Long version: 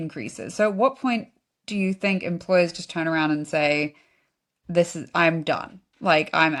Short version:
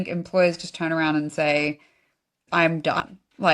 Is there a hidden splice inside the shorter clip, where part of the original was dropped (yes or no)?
yes